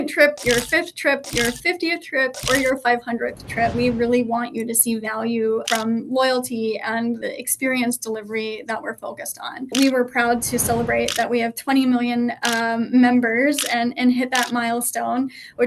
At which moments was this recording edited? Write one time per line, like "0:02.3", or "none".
0:03.7
0:05.6
0:07.2
0:09.7